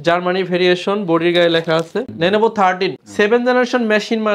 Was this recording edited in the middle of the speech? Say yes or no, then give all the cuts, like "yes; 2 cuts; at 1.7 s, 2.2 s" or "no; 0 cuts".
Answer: yes; 2 cuts; at 2.1 s, 3.0 s